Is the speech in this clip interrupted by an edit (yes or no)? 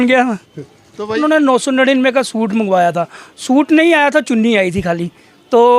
yes